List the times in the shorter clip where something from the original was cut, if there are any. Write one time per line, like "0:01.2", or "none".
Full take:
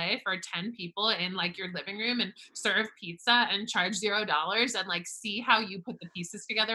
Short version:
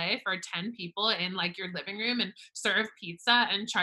none